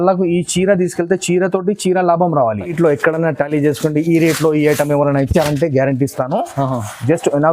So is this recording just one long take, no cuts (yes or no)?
no